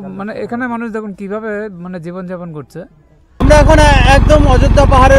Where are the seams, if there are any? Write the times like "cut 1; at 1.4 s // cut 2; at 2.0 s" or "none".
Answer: cut 1; at 3.4 s